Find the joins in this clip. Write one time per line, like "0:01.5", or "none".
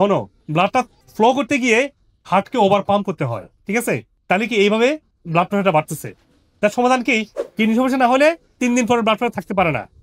0:07.4